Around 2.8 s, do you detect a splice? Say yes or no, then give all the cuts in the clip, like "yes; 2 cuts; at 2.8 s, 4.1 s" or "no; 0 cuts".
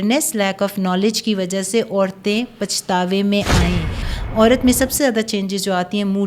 no; 1 cut; at 4.0 s